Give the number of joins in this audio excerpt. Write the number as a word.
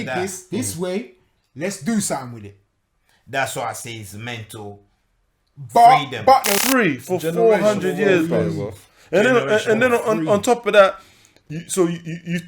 one